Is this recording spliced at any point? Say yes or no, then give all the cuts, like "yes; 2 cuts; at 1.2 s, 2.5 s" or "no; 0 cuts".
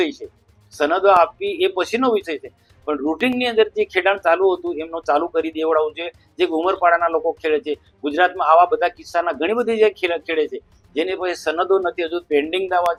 no; 0 cuts